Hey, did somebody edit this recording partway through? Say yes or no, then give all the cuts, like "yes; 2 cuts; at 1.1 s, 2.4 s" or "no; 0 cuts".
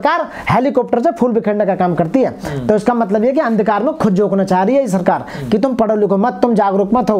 no; 0 cuts